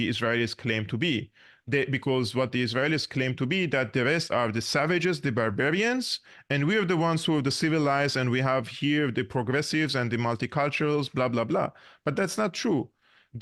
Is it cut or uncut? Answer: uncut